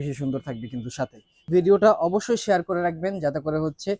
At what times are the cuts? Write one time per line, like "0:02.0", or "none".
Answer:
0:01.3